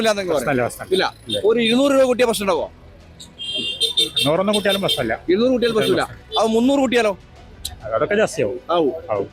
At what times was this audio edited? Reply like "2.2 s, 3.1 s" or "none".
none